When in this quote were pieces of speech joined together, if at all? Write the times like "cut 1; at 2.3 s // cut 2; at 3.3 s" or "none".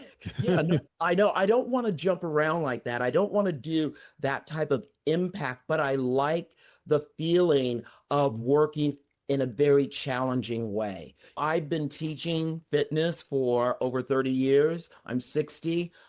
cut 1; at 11.4 s